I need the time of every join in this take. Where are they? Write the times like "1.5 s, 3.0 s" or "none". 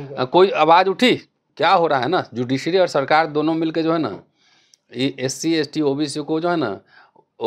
1.4 s